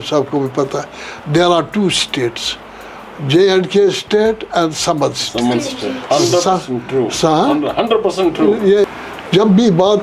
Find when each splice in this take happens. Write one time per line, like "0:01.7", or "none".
0:08.9